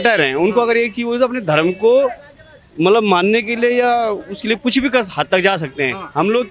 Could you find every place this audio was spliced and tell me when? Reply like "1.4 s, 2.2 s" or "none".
none